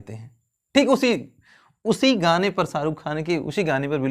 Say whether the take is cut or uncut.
uncut